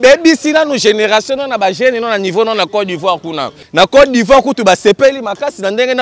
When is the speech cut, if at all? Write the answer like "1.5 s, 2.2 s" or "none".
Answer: 3.6 s

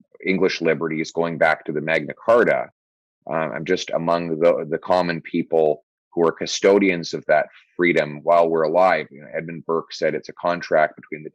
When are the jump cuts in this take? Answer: none

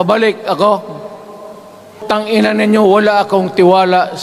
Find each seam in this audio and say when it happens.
2.0 s

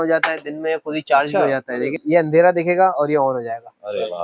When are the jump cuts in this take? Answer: 2.0 s

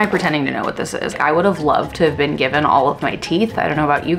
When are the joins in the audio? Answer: 1.1 s

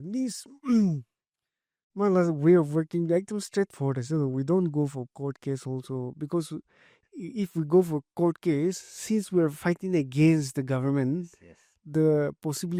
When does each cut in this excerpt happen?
none

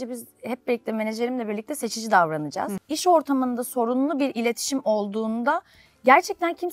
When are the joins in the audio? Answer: 2.8 s

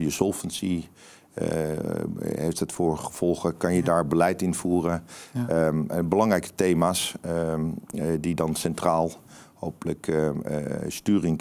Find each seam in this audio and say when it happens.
none

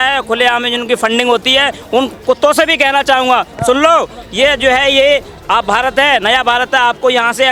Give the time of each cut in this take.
none

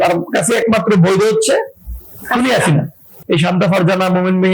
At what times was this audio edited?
3.1 s

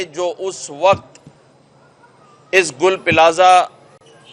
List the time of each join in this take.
none

